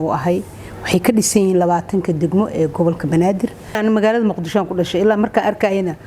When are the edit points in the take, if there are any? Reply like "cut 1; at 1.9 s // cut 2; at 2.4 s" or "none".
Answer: cut 1; at 3.6 s